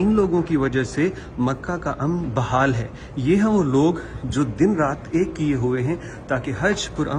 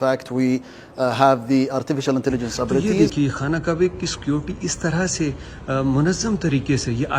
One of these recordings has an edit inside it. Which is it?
second; 1 cut; at 2.9 s

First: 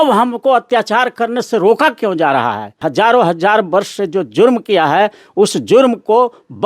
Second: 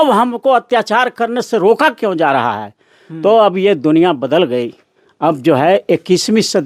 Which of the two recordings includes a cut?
first; 1 cut; at 2.8 s

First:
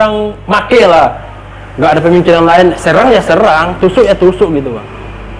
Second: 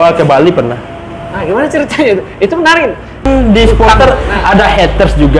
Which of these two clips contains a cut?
second; 1 cut; at 3.2 s

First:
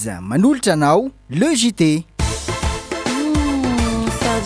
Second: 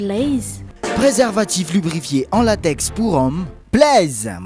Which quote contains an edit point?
first; 1 cut; at 2.2 s

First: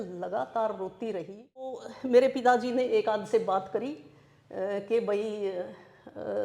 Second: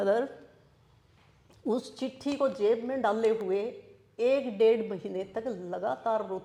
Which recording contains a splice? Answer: first; 1 cut; at 1.9 s

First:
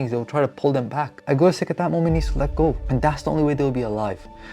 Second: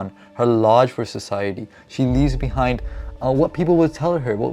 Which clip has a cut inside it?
first; 2 cuts; at 1.2 s, 2.8 s

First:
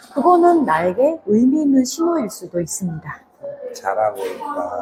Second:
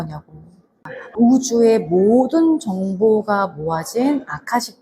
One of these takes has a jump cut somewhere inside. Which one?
second; 1 cut; at 1.1 s

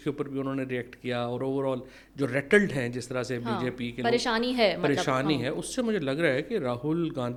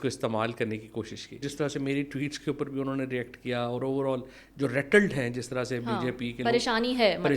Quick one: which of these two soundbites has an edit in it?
second; 1 cut; at 1.5 s

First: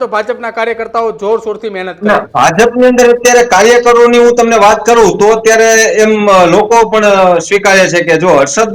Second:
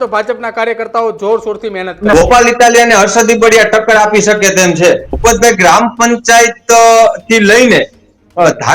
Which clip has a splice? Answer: second; 2 cuts; at 2.1 s, 5.1 s

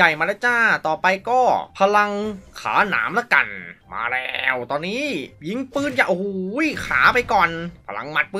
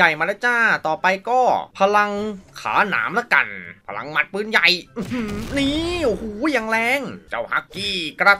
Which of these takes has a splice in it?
second; 2 cuts; at 3.8 s, 7.2 s

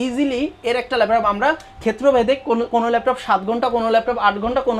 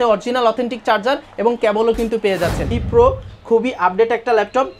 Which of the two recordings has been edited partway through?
second; 1 cut; at 2.7 s

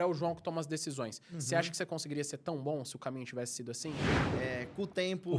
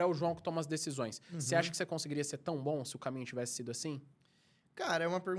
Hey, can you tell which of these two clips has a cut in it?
first; 1 cut; at 4.1 s

